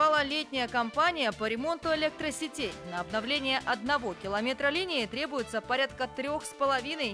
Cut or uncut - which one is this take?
uncut